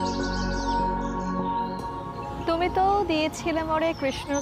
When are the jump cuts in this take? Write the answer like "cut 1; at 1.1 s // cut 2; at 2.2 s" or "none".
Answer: none